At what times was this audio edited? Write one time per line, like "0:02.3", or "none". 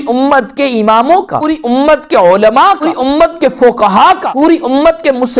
0:01.4
0:02.9
0:04.2

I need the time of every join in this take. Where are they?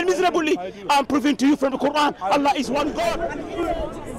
none

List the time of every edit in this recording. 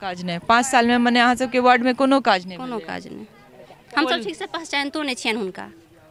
none

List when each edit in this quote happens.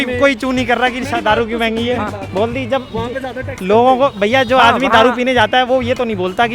0:02.2

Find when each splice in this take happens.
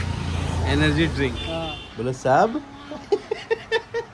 0:01.5

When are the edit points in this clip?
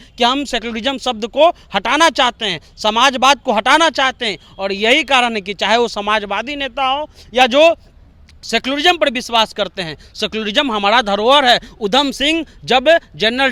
none

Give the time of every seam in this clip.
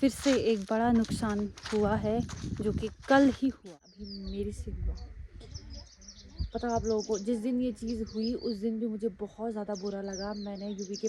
0:03.6

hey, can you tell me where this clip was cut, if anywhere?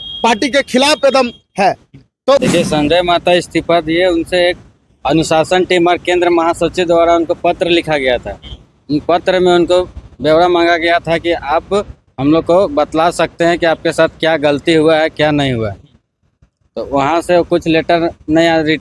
0:02.4

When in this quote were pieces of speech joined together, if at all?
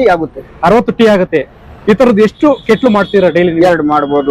none

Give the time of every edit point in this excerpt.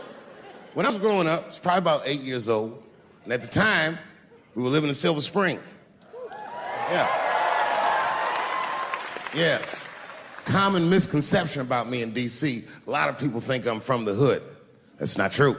0:00.9

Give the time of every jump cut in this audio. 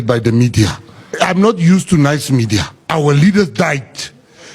0:01.1
0:02.8

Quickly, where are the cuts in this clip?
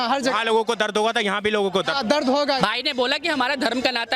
0:02.6

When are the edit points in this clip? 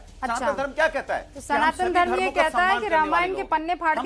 none

